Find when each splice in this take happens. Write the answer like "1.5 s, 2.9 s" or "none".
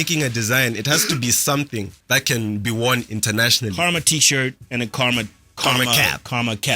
2.0 s, 3.7 s, 4.6 s, 5.4 s